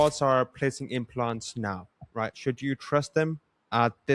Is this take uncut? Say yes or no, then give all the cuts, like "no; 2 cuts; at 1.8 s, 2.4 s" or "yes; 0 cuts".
yes; 0 cuts